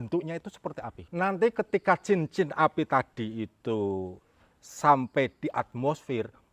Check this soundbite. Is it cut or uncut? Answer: cut